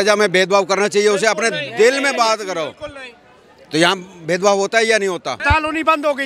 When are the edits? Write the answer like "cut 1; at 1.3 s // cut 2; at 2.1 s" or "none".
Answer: cut 1; at 5.3 s